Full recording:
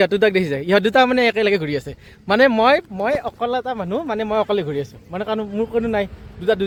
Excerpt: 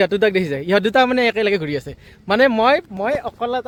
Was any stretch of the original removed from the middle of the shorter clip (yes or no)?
no